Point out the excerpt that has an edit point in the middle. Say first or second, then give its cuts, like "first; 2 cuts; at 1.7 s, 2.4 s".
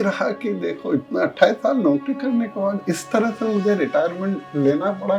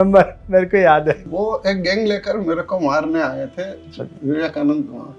second; 1 cut; at 1.3 s